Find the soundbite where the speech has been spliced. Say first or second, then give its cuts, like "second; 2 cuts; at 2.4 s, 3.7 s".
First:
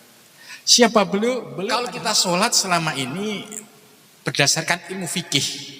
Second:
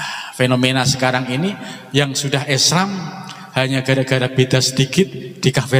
first; 1 cut; at 1.5 s